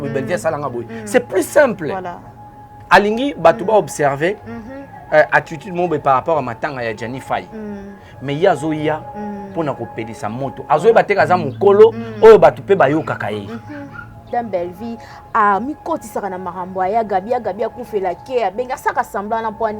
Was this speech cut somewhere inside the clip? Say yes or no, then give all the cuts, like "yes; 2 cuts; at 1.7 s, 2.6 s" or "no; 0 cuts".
yes; 2 cuts; at 2.7 s, 14.3 s